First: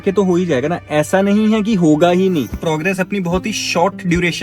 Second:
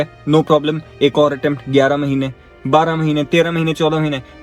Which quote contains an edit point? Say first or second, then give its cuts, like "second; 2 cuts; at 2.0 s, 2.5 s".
first; 1 cut; at 2.6 s